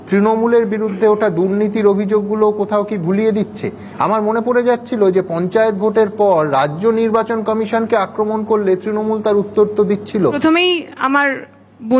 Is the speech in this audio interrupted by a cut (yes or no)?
yes